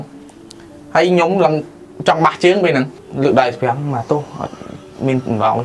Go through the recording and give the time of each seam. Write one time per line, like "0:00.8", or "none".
0:03.0